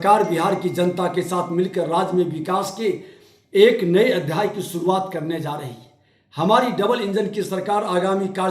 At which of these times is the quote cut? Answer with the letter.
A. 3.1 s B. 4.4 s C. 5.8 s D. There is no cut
D